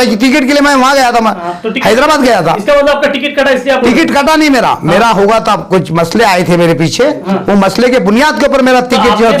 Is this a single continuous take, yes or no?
yes